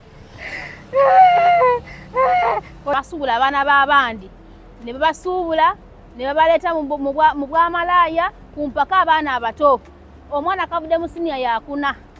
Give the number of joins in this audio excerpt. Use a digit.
1